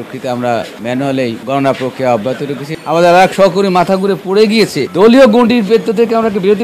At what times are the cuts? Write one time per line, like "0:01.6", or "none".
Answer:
0:02.7
0:04.8